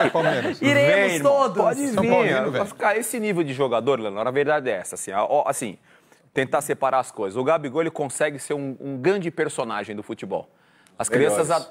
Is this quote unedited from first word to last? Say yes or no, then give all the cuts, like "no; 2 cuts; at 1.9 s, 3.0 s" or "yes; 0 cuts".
yes; 0 cuts